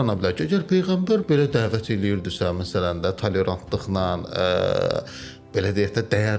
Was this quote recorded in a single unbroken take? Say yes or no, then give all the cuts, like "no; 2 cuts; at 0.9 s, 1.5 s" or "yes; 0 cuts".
yes; 0 cuts